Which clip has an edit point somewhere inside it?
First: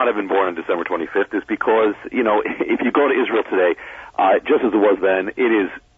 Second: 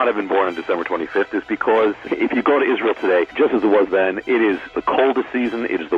second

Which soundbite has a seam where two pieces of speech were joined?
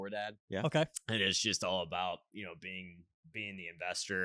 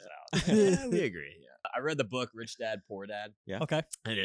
second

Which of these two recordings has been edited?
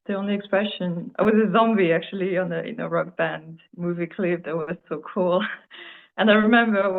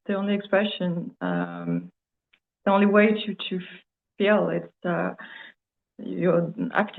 first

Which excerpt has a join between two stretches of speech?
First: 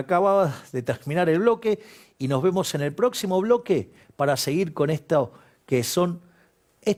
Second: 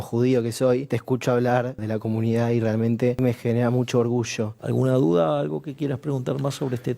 second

